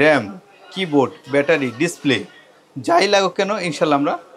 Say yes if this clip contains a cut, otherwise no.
no